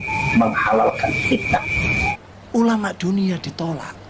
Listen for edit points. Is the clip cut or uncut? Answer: cut